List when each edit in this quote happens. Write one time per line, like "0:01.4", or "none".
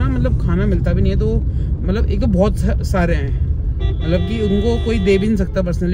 none